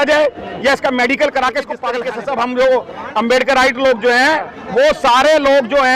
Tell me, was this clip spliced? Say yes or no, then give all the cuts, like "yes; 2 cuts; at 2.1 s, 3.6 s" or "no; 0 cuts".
yes; 1 cut; at 2.0 s